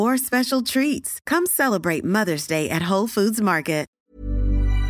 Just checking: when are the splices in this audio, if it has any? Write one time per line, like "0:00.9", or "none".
0:03.9